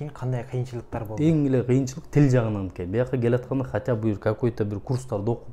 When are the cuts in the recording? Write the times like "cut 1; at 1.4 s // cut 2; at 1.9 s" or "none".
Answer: cut 1; at 1.0 s